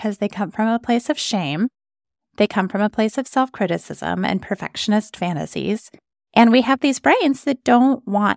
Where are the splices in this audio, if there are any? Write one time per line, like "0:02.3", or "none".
none